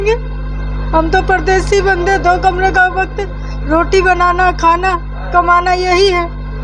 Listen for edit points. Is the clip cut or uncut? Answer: uncut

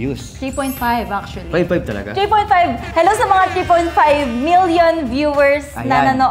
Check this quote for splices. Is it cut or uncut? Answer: uncut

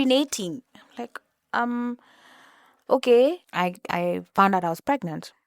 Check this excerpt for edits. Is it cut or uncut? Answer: cut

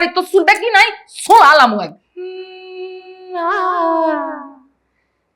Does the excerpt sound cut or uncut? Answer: cut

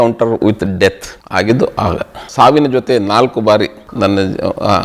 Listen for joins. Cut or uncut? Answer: cut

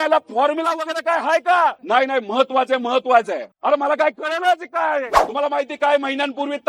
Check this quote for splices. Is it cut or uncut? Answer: cut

